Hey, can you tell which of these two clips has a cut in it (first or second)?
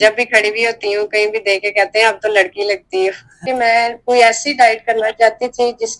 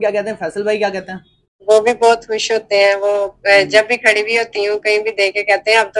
first